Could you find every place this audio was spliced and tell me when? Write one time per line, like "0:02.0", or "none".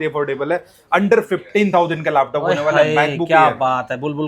none